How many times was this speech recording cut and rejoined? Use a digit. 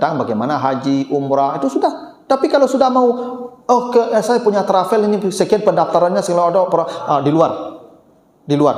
0